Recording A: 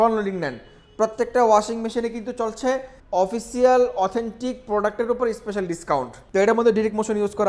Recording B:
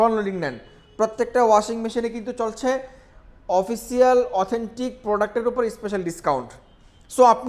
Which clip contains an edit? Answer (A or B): A